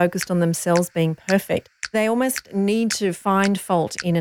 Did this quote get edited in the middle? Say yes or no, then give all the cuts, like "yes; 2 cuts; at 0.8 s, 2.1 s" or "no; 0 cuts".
yes; 1 cut; at 1.9 s